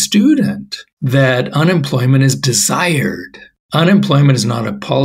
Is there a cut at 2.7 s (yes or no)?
no